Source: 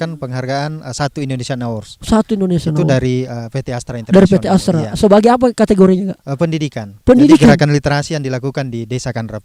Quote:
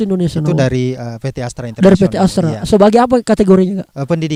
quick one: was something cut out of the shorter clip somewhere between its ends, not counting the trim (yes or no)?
no